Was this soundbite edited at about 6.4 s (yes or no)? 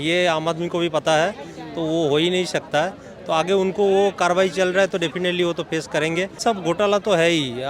yes